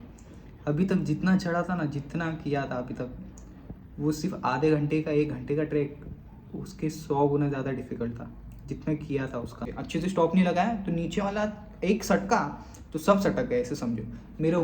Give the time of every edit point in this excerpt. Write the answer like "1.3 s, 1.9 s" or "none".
9.7 s